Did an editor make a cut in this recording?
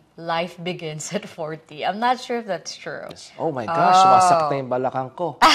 yes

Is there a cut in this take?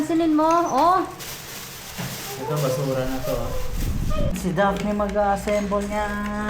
yes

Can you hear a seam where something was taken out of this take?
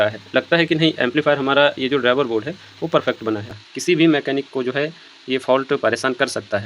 yes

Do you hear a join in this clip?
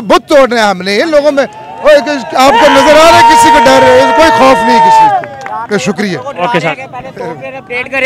no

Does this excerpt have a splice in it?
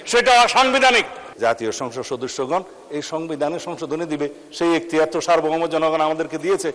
yes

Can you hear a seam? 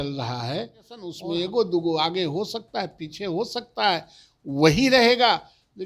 yes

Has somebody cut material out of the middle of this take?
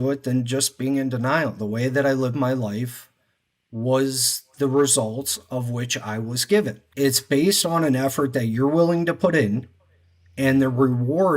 yes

